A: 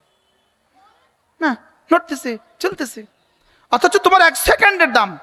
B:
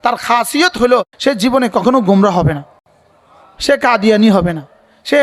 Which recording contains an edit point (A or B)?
B